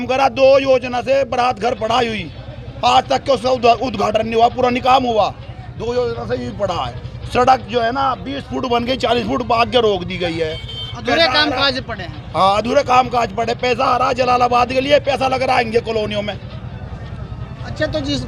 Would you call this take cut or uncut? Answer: uncut